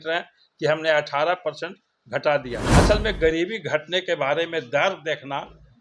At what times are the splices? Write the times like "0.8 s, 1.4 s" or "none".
2.6 s